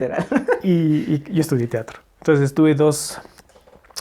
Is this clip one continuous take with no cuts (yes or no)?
yes